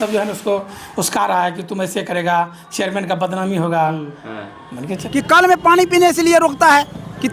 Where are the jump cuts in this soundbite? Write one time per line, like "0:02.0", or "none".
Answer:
0:04.9